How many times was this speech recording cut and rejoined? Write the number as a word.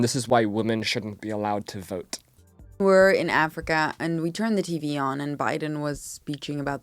one